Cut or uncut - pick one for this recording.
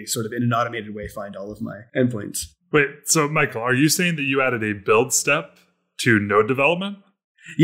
cut